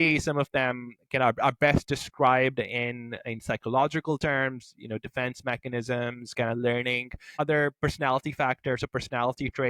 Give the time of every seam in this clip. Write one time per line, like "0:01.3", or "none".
0:07.4